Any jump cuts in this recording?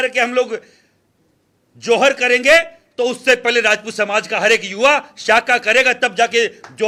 no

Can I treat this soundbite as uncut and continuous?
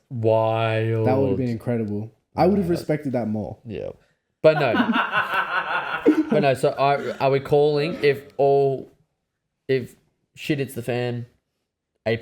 yes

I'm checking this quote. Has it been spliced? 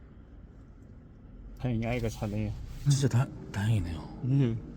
yes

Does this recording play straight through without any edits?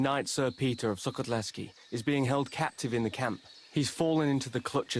yes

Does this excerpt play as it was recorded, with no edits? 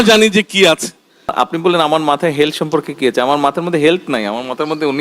no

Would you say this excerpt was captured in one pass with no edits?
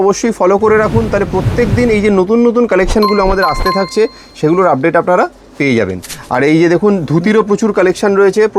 yes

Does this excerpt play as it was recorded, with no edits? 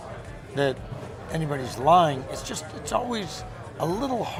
yes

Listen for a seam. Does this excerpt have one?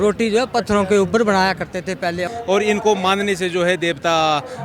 yes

